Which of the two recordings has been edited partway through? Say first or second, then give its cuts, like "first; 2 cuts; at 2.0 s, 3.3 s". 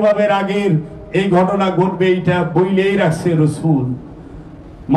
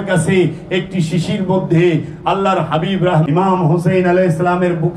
second; 1 cut; at 3.3 s